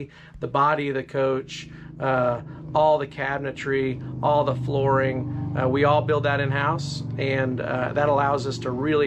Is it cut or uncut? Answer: uncut